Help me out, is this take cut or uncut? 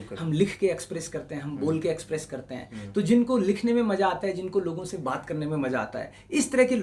uncut